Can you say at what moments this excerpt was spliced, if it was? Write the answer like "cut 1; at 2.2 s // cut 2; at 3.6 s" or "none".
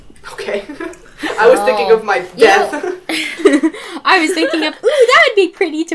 none